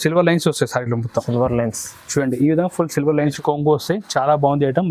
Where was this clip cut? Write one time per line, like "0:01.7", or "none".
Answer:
0:03.3